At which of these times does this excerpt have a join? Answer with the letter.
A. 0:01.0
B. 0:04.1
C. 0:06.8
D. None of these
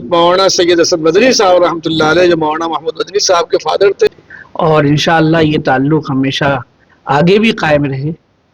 B